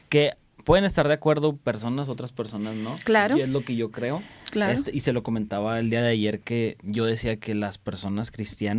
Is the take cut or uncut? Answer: uncut